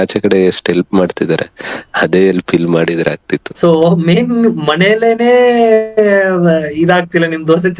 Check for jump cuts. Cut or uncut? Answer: cut